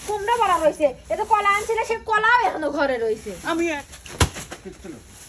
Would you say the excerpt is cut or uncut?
cut